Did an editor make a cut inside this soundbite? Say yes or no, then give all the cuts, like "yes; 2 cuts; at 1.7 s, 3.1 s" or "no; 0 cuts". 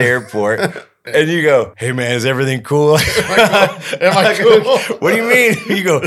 yes; 2 cuts; at 1.0 s, 1.8 s